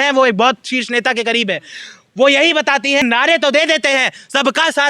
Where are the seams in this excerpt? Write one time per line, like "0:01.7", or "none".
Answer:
0:03.0